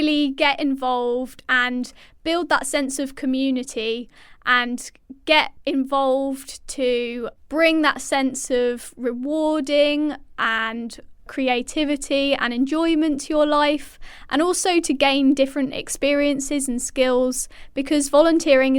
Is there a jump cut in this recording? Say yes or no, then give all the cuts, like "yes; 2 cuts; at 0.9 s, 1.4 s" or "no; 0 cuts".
yes; 1 cut; at 4.2 s